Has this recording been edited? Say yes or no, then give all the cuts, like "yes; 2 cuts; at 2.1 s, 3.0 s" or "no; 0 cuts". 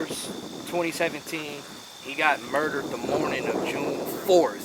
no; 0 cuts